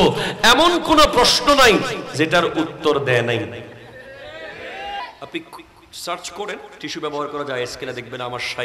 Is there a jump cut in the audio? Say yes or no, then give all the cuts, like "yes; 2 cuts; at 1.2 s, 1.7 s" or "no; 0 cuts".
yes; 1 cut; at 5.0 s